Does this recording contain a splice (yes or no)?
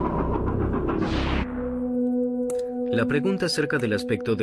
no